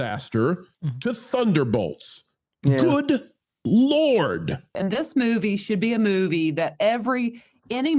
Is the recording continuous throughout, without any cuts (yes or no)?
no